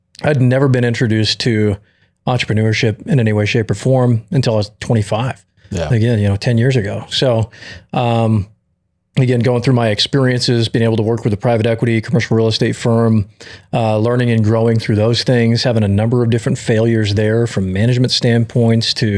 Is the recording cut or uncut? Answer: uncut